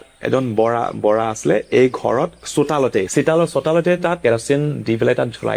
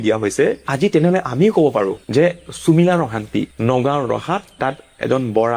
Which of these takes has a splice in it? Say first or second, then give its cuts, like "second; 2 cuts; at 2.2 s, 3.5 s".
first; 2 cuts; at 2.4 s, 4.2 s